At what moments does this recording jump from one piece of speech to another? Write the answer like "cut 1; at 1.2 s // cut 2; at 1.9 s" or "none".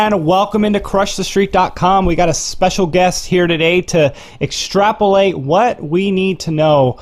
none